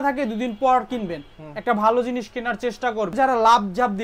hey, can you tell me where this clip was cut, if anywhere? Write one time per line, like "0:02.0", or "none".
0:03.1